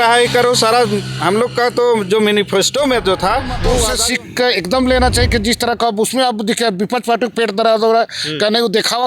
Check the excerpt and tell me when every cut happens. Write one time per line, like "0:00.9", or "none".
0:03.9